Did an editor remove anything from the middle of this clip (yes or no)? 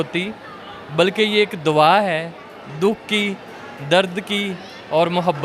no